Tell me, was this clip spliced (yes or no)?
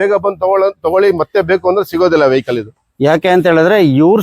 no